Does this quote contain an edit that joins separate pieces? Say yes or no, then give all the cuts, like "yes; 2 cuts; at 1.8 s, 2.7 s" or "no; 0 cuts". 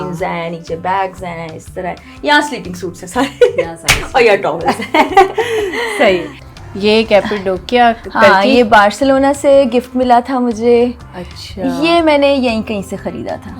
yes; 1 cut; at 6.3 s